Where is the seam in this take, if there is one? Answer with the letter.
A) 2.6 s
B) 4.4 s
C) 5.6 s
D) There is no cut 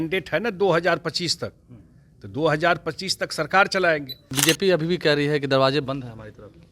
B